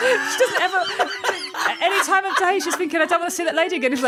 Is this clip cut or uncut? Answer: uncut